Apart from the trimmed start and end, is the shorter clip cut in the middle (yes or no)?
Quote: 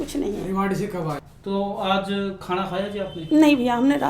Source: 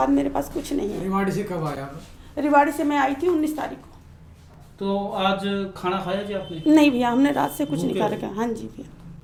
yes